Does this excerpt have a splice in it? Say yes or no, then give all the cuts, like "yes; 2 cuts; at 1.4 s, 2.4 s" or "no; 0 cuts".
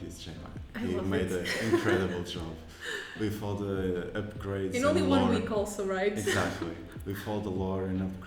no; 0 cuts